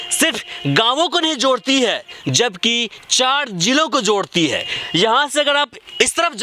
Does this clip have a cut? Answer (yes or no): no